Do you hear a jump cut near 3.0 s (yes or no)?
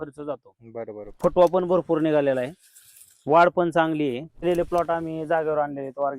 no